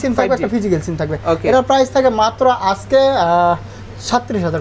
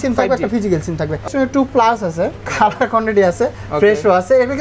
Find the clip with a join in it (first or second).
second